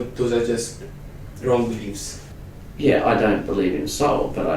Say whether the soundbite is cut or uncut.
cut